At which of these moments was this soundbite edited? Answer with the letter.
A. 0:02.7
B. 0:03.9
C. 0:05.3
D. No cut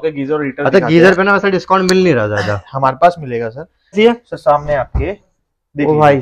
B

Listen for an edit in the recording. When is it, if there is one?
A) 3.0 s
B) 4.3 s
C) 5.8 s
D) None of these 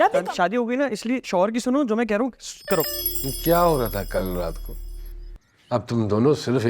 A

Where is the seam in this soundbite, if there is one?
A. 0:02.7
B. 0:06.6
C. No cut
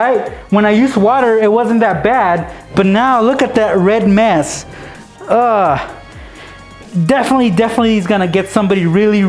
C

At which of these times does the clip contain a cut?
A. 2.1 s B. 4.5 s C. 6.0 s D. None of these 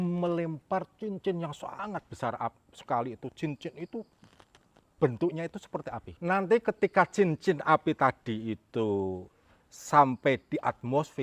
C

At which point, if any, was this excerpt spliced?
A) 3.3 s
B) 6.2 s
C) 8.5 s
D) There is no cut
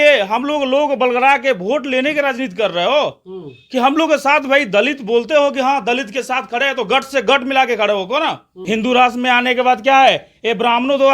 C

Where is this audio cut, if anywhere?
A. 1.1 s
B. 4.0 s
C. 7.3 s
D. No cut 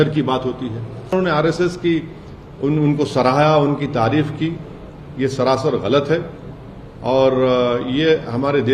A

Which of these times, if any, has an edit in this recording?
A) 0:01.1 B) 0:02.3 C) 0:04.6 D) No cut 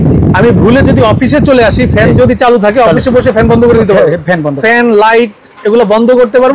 C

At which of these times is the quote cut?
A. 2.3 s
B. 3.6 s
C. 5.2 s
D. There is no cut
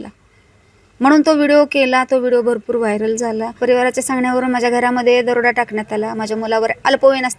B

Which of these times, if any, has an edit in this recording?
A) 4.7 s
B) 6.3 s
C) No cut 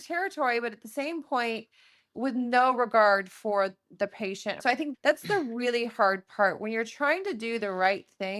A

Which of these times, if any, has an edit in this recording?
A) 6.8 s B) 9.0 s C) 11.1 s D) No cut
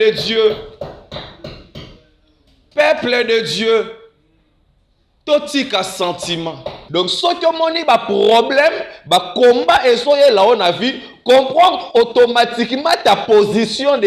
A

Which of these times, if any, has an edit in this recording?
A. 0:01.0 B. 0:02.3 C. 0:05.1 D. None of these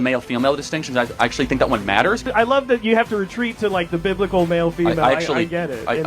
B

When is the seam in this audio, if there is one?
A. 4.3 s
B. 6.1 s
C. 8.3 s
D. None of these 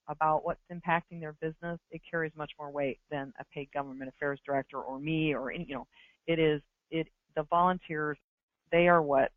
C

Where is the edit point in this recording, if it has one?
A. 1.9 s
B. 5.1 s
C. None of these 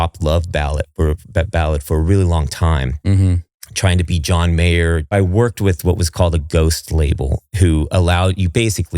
B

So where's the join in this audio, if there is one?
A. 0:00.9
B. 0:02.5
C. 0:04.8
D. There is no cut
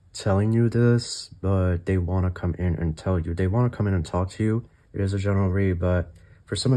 C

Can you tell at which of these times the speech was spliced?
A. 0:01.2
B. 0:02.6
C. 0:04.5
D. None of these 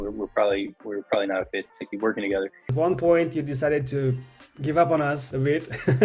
B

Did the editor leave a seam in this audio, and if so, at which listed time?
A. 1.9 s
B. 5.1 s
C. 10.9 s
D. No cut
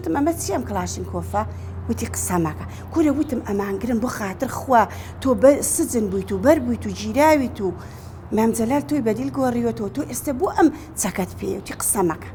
D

